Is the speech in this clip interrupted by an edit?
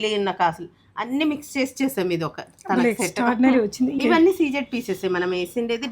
yes; 1 cut; at 4.0 s

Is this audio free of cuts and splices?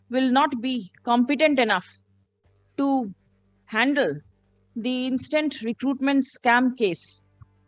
yes; 0 cuts

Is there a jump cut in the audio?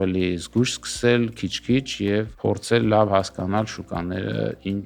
yes; 1 cut; at 2.3 s

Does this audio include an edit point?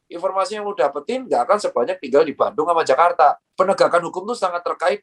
yes; 1 cut; at 3.5 s

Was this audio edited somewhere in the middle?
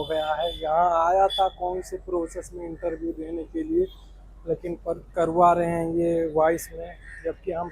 no; 0 cuts

